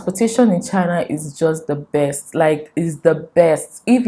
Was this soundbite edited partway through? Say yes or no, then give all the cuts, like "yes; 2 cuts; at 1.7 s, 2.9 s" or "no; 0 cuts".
no; 0 cuts